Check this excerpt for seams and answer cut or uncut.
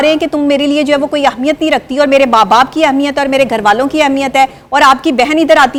uncut